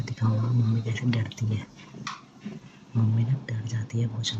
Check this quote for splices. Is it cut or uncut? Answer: uncut